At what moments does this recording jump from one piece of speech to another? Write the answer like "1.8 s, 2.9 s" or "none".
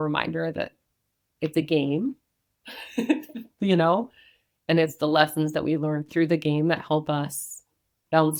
none